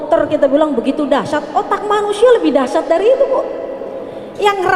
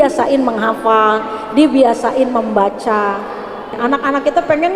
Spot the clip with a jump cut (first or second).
second